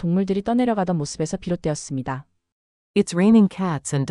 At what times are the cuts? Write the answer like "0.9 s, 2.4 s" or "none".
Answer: none

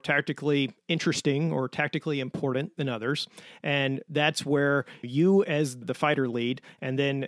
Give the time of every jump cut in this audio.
5.0 s, 5.8 s

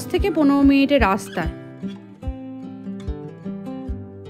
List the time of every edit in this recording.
1.5 s

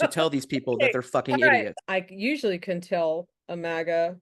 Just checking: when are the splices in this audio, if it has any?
1.7 s

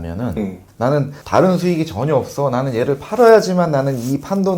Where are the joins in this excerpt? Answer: 1.0 s

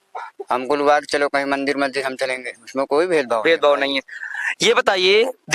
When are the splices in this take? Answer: none

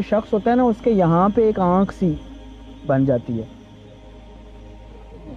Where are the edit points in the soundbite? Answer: none

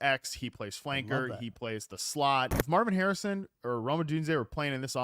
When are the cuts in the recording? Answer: 2.6 s

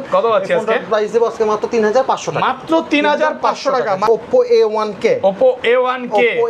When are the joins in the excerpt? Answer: 4.1 s

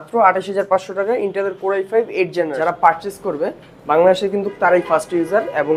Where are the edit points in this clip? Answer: 2.5 s

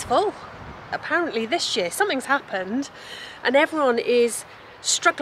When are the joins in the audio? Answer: 1.0 s

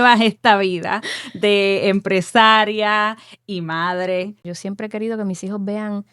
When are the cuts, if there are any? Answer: 4.5 s

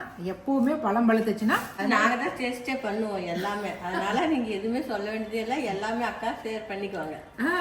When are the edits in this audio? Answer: 1.7 s

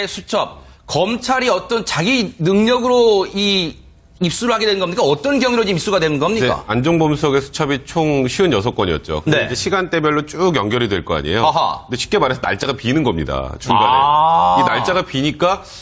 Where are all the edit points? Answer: 2.3 s

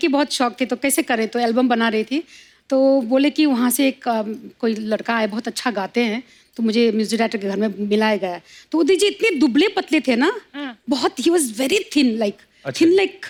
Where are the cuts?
none

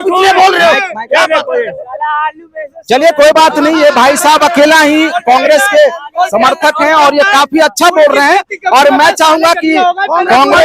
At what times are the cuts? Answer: none

